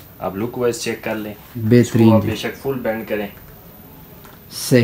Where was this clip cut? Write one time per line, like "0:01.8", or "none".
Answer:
none